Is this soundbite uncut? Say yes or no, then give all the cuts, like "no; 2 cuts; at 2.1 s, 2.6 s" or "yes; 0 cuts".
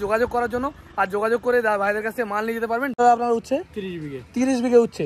no; 1 cut; at 2.9 s